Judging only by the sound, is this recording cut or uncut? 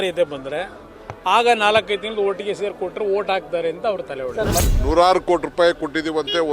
cut